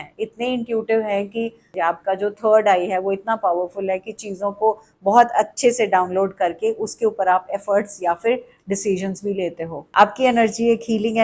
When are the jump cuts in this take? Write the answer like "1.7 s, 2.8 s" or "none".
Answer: 1.7 s, 9.8 s

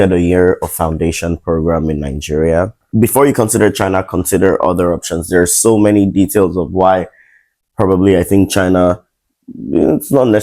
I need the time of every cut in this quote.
2.8 s

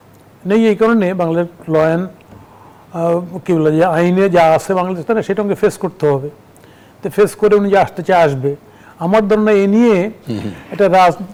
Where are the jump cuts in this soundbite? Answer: none

